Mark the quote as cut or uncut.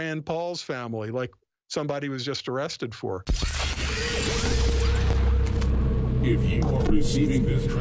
cut